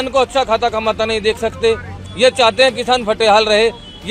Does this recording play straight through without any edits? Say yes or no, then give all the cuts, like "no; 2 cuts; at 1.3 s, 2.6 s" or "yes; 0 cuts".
yes; 0 cuts